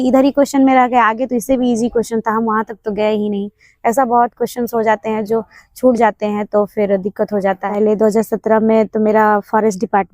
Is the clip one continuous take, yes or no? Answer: no